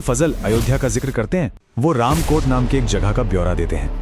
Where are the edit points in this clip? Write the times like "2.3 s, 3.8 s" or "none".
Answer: 1.6 s